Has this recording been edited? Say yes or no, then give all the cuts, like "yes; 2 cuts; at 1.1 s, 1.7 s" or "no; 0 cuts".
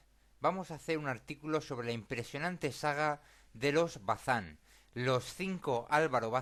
no; 0 cuts